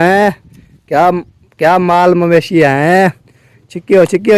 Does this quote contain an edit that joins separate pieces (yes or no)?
no